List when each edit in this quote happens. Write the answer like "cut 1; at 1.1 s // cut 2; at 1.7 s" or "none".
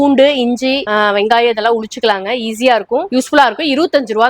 cut 1; at 3.1 s